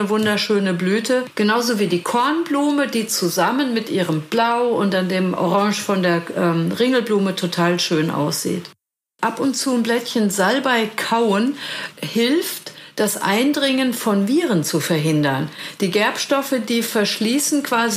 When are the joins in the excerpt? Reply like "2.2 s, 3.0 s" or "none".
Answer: 1.3 s, 9.1 s